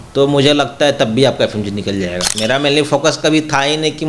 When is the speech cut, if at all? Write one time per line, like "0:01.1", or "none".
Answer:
0:02.3